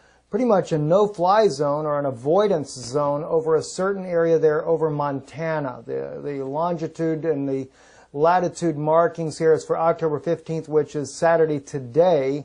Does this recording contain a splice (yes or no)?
no